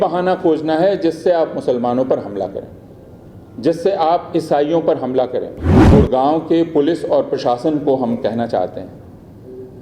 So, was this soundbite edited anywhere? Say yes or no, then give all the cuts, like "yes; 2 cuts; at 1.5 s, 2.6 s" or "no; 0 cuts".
yes; 1 cut; at 5.8 s